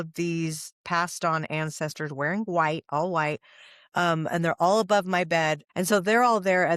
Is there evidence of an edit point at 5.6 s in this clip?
yes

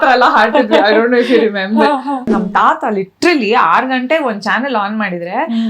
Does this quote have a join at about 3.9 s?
no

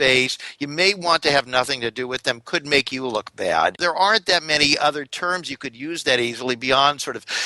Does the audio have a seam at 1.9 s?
no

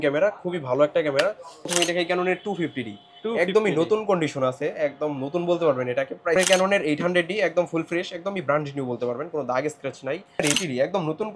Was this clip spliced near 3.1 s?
no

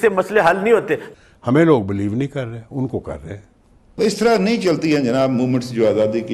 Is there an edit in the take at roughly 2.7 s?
no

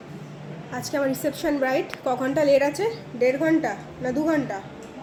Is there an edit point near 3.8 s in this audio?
no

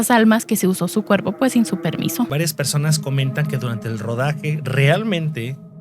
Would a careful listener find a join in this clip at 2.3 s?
yes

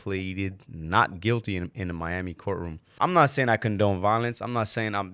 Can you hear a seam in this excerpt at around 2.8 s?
yes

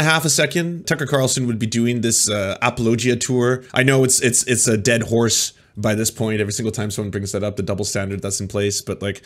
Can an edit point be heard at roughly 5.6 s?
no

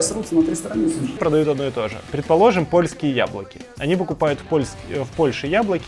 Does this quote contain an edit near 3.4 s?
no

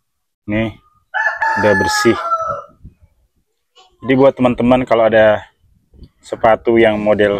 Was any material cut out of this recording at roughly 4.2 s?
no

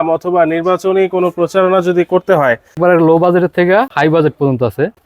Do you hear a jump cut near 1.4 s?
no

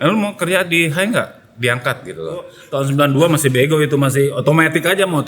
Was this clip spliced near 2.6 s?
yes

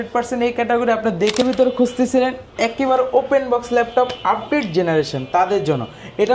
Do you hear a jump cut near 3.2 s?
no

